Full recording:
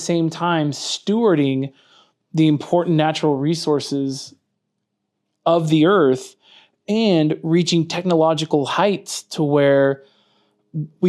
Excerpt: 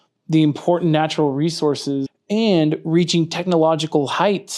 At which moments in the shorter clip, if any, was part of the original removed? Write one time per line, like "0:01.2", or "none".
0:02.2

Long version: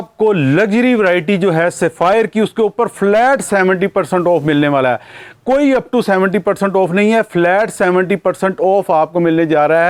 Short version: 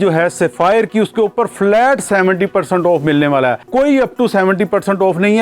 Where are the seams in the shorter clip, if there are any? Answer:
0:03.6

